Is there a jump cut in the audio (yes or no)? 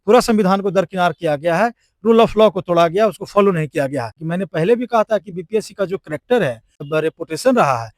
yes